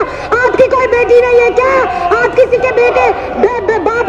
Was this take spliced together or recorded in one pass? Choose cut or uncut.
uncut